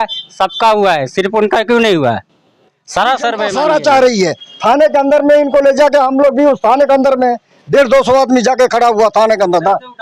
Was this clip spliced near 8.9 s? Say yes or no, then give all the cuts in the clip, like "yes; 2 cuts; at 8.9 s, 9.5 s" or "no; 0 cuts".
no; 1 cut; at 3.5 s